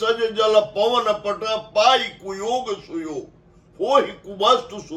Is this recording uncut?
yes; 0 cuts

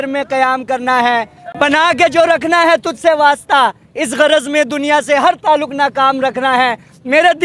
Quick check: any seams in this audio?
no; 0 cuts

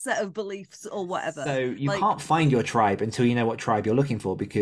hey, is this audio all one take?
no; 1 cut; at 1.4 s

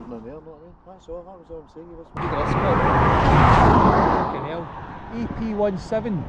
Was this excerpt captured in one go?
no; 1 cut; at 2.2 s

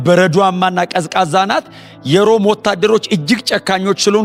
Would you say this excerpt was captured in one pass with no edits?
yes; 0 cuts

